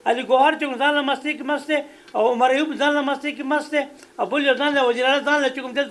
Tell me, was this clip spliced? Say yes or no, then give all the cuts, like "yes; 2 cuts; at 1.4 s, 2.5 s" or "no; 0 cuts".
no; 0 cuts